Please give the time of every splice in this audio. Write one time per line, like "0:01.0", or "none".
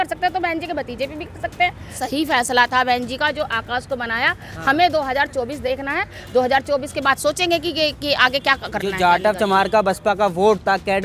0:02.0